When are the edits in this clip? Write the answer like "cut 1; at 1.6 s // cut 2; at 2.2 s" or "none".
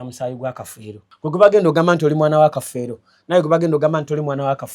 cut 1; at 1.0 s